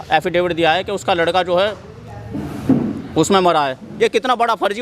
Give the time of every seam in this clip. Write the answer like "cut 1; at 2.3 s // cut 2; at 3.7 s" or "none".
cut 1; at 3.8 s